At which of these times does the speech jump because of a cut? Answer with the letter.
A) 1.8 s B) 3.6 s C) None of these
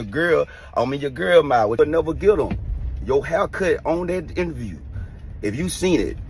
A